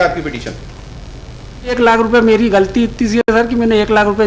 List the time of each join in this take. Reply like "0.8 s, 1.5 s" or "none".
1.7 s